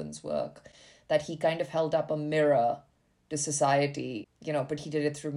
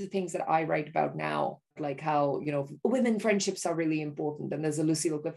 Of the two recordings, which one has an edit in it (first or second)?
first